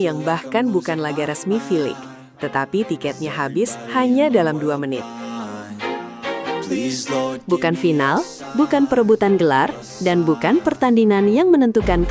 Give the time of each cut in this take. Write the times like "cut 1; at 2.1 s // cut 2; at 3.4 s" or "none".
none